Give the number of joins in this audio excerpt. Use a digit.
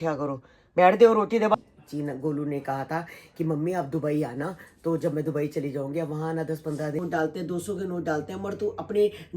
2